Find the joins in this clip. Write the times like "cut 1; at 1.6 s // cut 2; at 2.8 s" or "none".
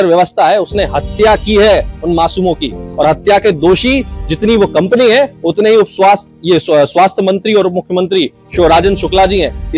none

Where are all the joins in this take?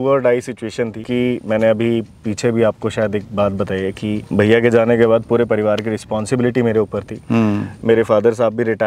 cut 1; at 1.0 s // cut 2; at 4.2 s

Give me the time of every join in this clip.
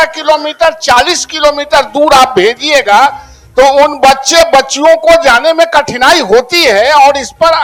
none

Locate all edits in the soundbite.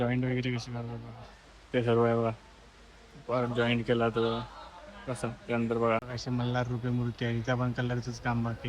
cut 1; at 6.1 s

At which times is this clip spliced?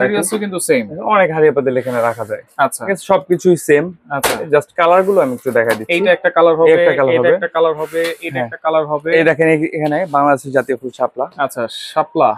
none

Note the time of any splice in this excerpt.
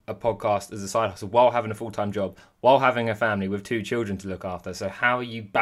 none

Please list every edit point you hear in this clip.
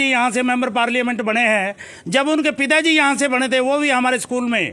none

